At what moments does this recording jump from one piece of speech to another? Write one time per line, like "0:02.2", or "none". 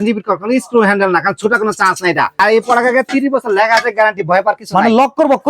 0:02.4